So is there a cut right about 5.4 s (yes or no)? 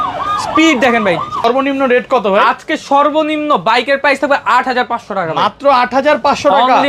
no